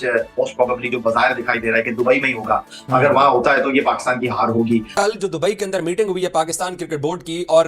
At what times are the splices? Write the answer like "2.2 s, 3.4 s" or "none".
5.0 s